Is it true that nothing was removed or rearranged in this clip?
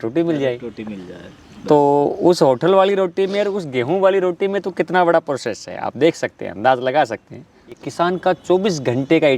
no; 1 cut; at 7.7 s

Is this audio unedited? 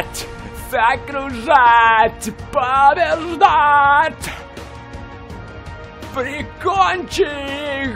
yes; 0 cuts

